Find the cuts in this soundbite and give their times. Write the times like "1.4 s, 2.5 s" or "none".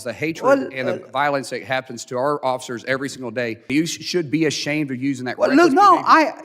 3.6 s